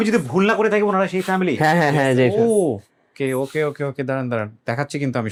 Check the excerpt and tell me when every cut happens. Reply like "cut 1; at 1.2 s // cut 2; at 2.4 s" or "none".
none